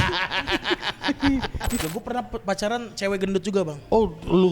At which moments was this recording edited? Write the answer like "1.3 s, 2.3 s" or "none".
1.8 s

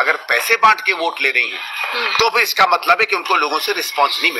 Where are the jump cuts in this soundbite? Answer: none

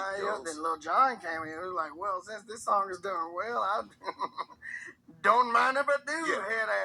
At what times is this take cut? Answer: none

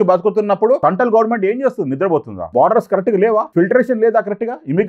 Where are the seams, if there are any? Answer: 0.8 s, 2.4 s, 3.5 s

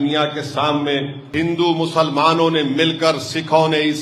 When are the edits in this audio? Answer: 1.3 s

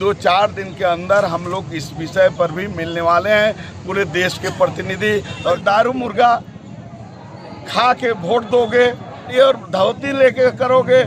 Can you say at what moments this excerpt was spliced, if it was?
5.6 s, 9.3 s

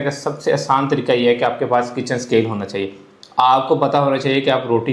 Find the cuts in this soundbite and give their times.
none

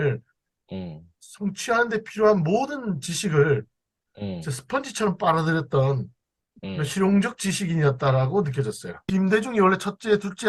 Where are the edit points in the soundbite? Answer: 8.9 s

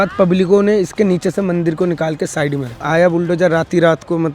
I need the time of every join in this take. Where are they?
2.8 s

